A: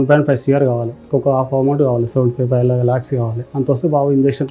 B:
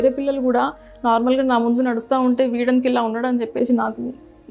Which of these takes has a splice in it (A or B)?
A